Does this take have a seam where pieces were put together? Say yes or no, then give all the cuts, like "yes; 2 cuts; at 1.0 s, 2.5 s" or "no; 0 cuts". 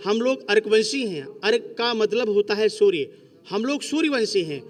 no; 0 cuts